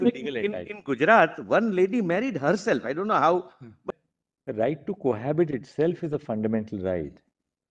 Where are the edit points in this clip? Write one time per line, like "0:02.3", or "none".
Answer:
0:03.8

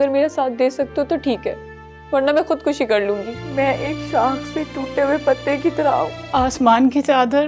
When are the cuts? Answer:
0:03.4
0:06.2

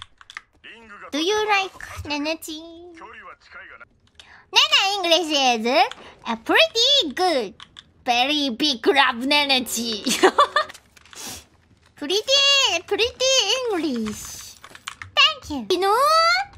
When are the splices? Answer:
0:10.7

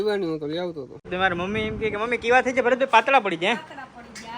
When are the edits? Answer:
0:01.1

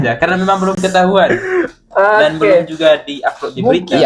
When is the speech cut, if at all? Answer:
none

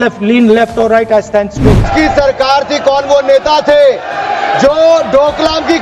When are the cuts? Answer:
0:01.9

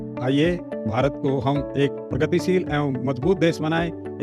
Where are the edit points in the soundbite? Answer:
none

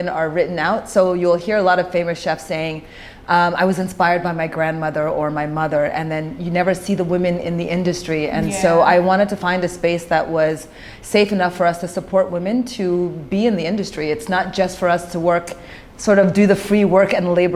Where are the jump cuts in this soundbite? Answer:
none

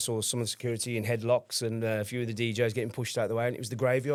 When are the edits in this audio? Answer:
none

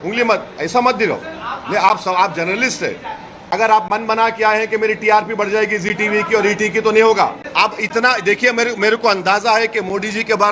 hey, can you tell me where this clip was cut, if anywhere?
0:03.4
0:07.4

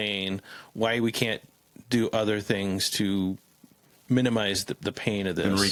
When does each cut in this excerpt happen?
none

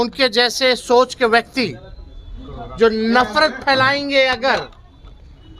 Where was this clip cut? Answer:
none

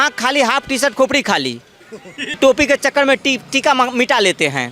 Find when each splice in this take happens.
0:02.3

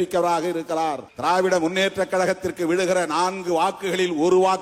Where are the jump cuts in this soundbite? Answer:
0:01.1

